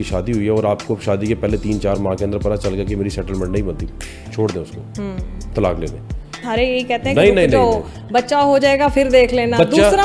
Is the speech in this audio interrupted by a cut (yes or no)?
yes